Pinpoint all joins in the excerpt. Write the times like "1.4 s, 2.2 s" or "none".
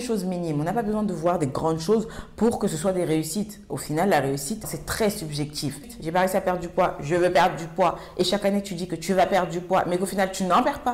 4.7 s, 5.9 s